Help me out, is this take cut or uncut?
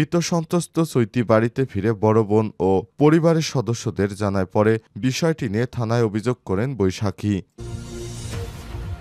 cut